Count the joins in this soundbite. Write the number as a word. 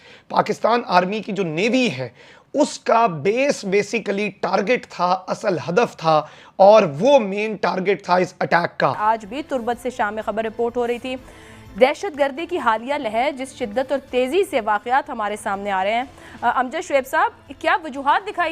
one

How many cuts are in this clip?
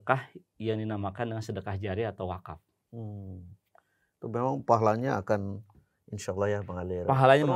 zero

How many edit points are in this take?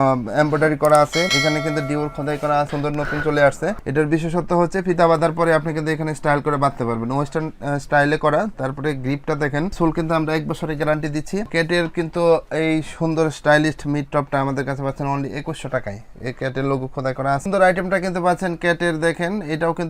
four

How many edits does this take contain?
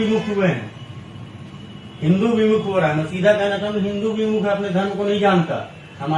zero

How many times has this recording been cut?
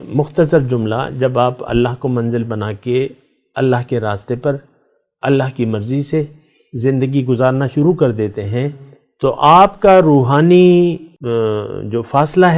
one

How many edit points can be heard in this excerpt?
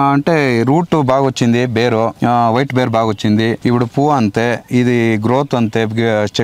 two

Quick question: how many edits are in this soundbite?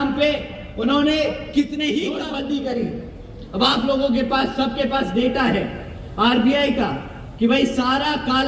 one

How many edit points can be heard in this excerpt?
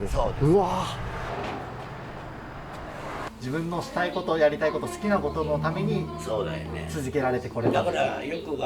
two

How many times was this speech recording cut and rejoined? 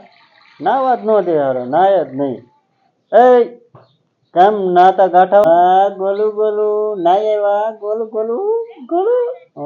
one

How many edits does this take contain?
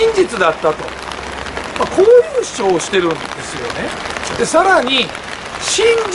zero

